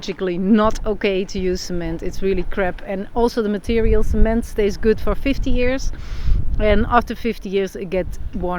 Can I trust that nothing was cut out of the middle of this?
yes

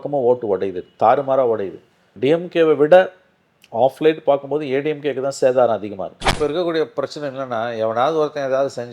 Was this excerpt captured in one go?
no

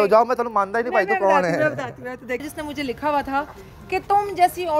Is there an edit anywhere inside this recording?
yes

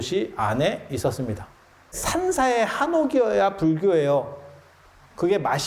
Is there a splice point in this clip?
yes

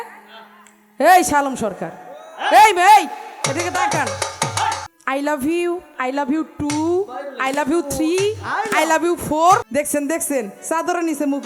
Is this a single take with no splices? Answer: no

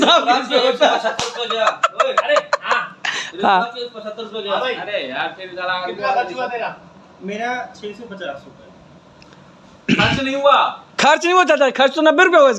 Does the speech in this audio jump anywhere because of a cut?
no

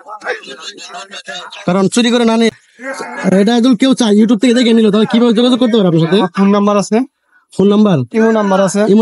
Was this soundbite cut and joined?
yes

